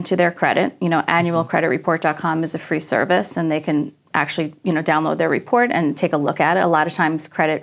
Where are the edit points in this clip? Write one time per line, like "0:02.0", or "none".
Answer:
none